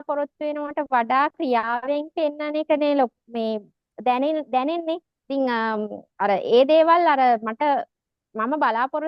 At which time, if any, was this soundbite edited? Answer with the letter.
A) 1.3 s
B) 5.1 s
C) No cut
C